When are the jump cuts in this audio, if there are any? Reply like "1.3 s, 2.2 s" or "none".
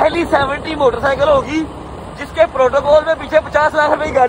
none